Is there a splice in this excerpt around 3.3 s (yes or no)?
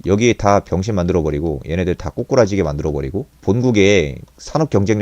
yes